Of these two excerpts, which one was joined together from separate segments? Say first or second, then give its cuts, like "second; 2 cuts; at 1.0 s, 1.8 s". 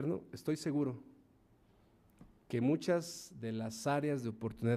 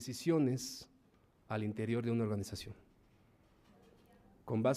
second; 1 cut; at 1.5 s